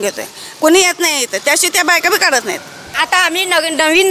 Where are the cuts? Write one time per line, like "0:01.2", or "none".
0:02.9